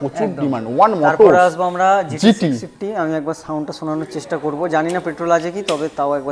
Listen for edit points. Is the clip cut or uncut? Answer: uncut